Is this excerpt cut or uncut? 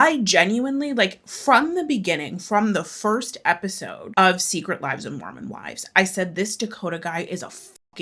uncut